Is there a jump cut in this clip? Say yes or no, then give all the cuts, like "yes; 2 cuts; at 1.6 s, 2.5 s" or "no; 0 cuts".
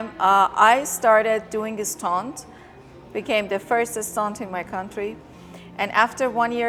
no; 0 cuts